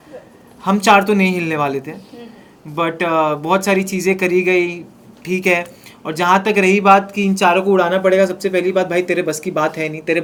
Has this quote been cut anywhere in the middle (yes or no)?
no